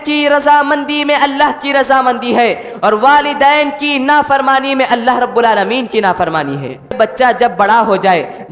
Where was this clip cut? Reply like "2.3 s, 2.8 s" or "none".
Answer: 7.1 s